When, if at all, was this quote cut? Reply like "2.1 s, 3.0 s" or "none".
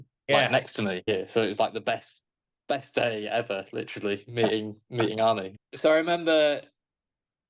1.1 s, 5.5 s